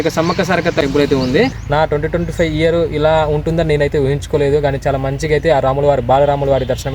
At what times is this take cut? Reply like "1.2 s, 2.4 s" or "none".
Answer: 0.8 s, 1.6 s